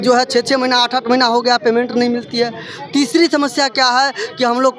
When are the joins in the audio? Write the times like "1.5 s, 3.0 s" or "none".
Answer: none